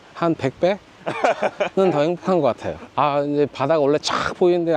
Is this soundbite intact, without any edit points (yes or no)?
no